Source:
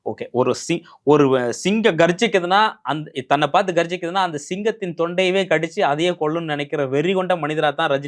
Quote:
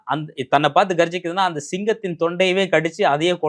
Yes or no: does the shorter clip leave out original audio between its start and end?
no